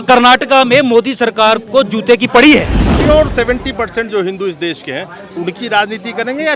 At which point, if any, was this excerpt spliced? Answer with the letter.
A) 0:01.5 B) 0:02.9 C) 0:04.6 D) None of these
B